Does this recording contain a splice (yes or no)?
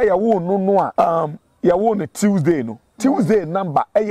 yes